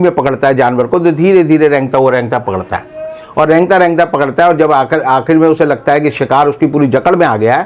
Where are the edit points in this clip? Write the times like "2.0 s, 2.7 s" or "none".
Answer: none